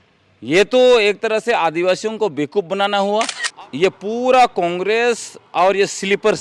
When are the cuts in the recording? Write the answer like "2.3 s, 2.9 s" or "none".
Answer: 3.4 s